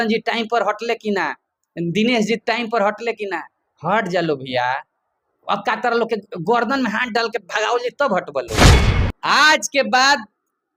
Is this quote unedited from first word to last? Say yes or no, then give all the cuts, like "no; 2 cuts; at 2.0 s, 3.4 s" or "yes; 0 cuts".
no; 2 cuts; at 8.5 s, 8.9 s